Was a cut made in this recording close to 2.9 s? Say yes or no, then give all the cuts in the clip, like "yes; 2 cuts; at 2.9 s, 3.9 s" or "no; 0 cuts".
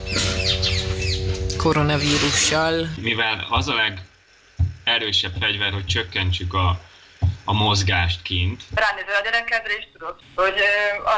yes; 3 cuts; at 2.9 s, 8.7 s, 10.2 s